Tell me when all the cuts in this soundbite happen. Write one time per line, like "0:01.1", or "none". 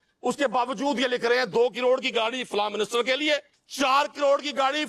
0:03.6